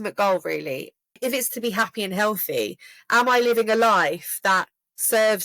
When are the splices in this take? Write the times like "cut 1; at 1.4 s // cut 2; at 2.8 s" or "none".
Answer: cut 1; at 1.1 s